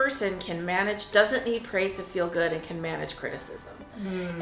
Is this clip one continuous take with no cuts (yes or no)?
yes